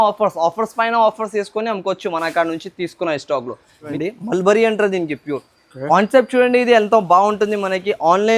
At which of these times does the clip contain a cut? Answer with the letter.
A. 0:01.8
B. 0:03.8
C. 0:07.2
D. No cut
B